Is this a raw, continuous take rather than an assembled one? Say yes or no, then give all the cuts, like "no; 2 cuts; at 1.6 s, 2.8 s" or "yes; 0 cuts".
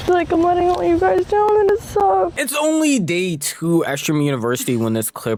yes; 0 cuts